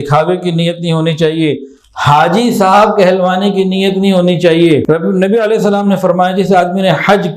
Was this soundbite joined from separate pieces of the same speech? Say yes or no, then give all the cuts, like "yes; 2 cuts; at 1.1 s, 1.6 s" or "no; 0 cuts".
yes; 1 cut; at 4.8 s